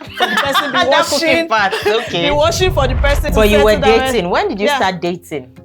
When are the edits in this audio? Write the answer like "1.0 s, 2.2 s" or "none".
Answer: 3.3 s